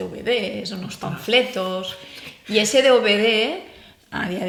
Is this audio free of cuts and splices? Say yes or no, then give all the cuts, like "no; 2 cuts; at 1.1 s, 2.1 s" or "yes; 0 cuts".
yes; 0 cuts